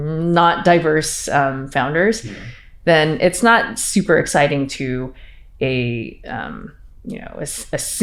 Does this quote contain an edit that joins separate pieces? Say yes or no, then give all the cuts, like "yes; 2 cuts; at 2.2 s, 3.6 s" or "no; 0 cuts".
no; 0 cuts